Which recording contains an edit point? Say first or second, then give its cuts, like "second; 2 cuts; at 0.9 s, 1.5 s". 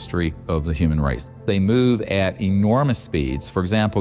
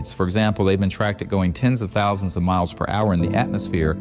first; 1 cut; at 1.4 s